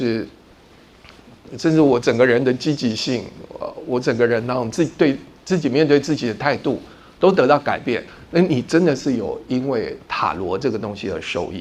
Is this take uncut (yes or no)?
yes